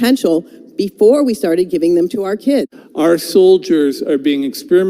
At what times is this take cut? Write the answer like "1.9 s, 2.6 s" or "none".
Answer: 2.8 s